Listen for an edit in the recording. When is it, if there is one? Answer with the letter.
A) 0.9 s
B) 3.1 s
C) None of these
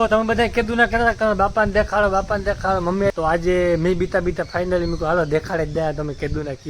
B